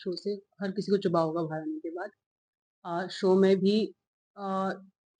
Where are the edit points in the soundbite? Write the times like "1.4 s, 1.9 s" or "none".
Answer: none